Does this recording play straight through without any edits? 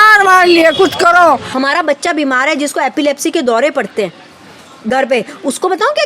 no; 1 cut; at 1.5 s

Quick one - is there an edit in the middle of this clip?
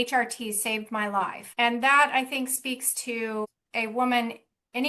yes; 2 cuts; at 1.4 s, 3.6 s

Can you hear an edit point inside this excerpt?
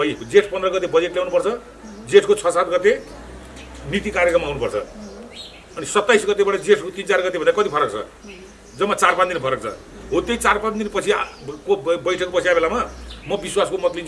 no; 0 cuts

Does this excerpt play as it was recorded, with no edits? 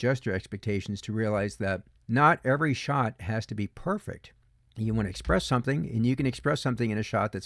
no; 1 cut; at 1.9 s

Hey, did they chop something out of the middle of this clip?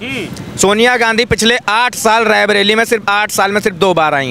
no; 0 cuts

